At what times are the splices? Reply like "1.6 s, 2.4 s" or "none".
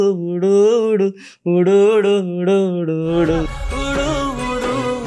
3.5 s